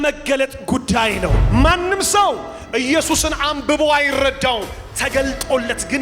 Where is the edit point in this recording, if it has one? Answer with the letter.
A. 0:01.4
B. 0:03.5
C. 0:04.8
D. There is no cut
A